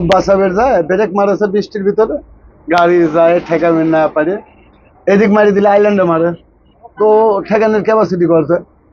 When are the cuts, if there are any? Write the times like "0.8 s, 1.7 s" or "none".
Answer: none